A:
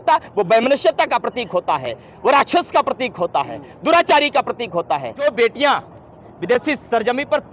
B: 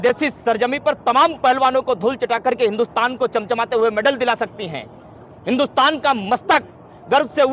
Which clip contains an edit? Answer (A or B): A